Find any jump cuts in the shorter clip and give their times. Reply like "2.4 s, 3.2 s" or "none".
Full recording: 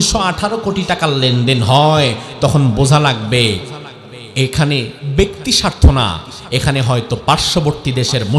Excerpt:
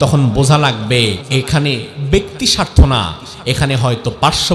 1.2 s